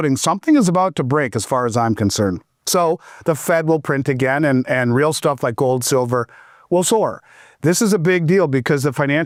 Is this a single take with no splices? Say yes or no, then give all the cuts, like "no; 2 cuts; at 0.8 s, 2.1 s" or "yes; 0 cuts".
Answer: yes; 0 cuts